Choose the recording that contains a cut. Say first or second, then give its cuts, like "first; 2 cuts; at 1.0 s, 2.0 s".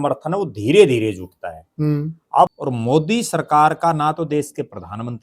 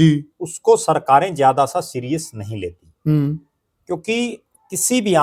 first; 1 cut; at 2.5 s